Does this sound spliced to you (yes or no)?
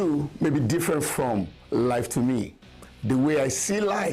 yes